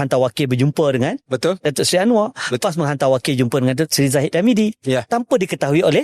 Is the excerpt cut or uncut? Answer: uncut